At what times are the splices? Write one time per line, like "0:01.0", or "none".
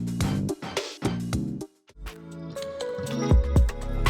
0:01.9